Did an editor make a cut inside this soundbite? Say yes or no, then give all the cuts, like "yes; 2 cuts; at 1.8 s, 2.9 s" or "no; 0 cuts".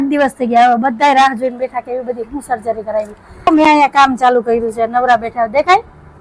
yes; 1 cut; at 3.5 s